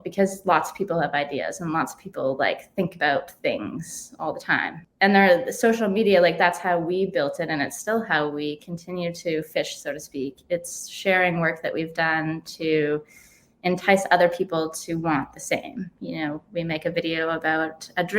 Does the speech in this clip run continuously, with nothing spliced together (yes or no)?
no